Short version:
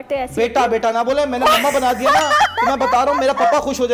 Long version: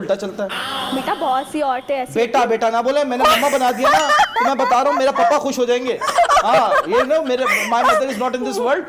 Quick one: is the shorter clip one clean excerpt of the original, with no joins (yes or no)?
yes